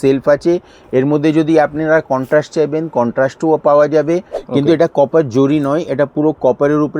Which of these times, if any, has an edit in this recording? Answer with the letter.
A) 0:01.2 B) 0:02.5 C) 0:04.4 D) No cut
C